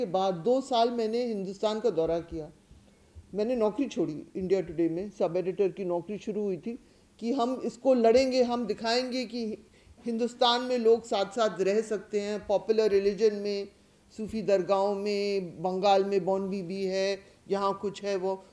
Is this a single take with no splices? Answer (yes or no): yes